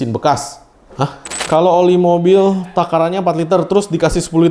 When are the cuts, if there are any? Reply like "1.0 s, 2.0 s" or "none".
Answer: 1.4 s